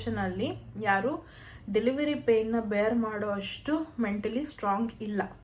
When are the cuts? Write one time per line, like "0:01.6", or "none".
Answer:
none